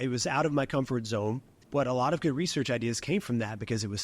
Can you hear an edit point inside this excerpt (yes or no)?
yes